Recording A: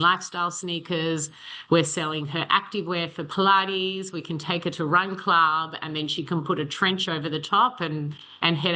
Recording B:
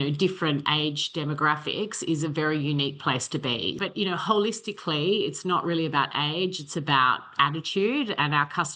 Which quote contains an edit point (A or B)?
B